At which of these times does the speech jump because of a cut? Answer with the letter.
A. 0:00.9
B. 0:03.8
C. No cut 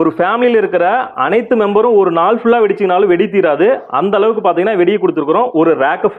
C